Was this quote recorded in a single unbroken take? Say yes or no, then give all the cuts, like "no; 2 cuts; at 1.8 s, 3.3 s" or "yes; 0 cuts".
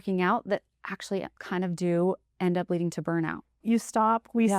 no; 2 cuts; at 1.4 s, 3.5 s